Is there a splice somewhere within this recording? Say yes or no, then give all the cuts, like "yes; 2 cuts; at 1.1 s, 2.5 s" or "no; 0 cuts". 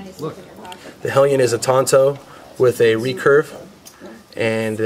yes; 1 cut; at 3.8 s